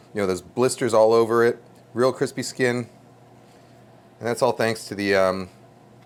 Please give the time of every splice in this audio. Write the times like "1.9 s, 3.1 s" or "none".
none